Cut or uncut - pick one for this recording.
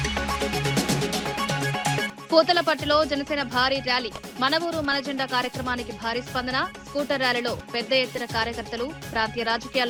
uncut